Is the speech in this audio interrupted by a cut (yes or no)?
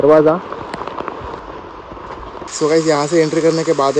yes